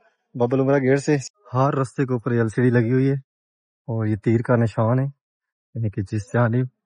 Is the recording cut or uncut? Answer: cut